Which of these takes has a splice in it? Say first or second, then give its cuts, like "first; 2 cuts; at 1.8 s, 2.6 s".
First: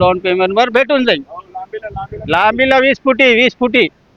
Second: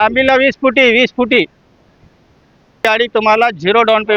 second; 1 cut; at 2.8 s